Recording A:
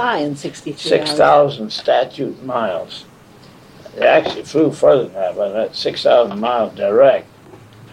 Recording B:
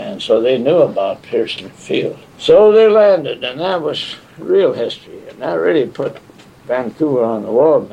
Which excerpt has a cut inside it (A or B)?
B